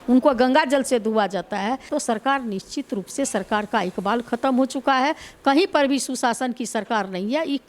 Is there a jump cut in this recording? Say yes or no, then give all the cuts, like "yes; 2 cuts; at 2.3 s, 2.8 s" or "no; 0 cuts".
yes; 1 cut; at 1.9 s